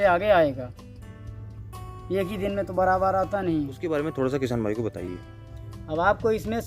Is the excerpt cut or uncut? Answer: cut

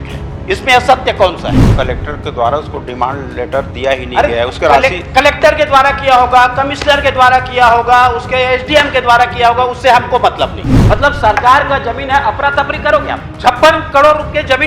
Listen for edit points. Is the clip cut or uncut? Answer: cut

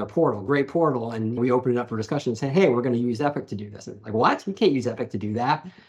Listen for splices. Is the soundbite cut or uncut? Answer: uncut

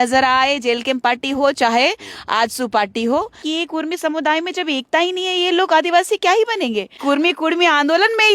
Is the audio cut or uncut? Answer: cut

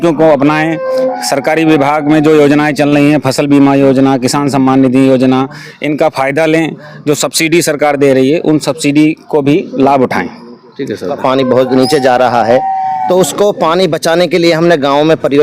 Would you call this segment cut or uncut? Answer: cut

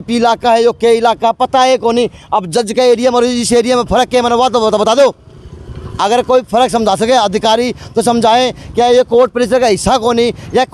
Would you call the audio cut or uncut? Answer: uncut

